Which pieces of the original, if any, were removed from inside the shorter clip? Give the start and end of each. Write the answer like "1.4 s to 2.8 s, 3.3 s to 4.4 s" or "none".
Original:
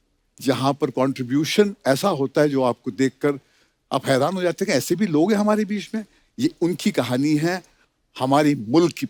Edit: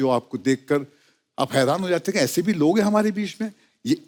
none